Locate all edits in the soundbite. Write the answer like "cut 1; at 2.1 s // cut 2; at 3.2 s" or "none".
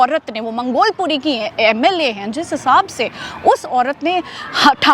none